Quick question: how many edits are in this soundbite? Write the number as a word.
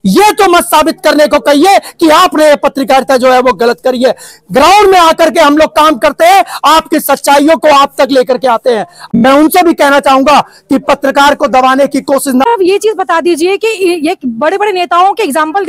two